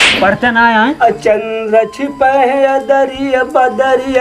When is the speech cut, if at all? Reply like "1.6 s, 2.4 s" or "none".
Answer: 1.0 s